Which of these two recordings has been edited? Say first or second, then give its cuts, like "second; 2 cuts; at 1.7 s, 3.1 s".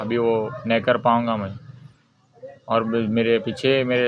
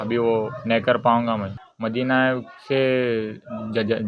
second; 1 cut; at 1.6 s